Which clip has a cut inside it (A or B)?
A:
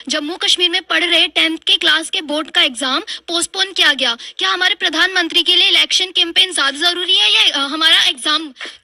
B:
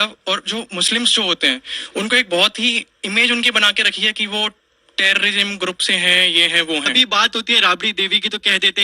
B